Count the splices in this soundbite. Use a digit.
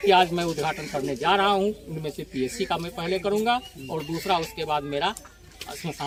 0